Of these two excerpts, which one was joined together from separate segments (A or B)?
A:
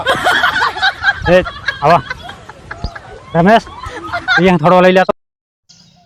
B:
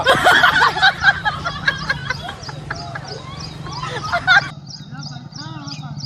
B